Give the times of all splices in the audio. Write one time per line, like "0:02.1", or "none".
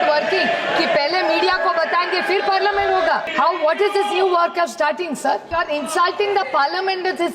0:03.3
0:05.5